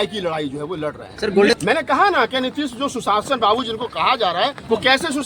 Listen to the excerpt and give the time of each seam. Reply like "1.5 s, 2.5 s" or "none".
1.5 s